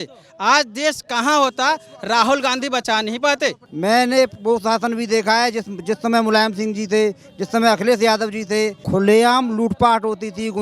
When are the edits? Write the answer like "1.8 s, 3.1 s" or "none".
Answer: 3.7 s, 8.8 s